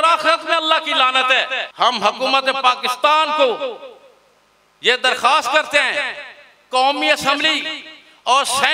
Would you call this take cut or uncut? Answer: cut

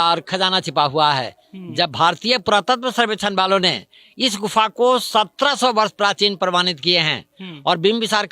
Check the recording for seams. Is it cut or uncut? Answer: uncut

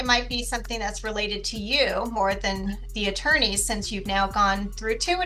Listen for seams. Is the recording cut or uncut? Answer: cut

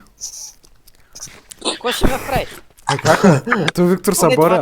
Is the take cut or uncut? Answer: uncut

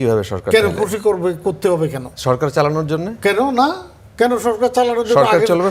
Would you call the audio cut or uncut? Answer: uncut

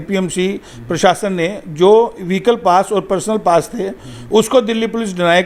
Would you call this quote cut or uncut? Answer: uncut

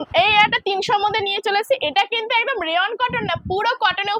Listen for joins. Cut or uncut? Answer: uncut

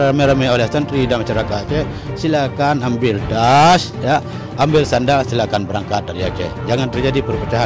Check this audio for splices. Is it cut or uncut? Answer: uncut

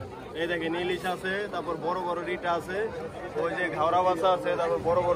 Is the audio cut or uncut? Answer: uncut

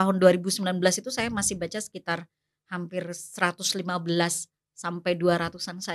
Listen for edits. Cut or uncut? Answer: uncut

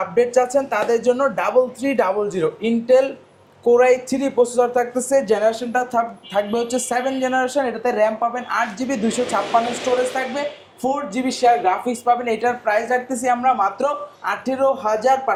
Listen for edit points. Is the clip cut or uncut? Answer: uncut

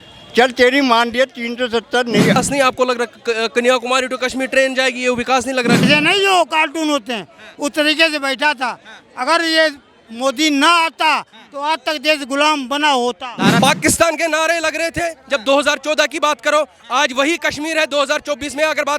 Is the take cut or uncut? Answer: cut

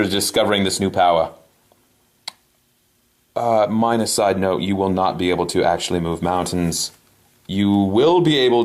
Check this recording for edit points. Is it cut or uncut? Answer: uncut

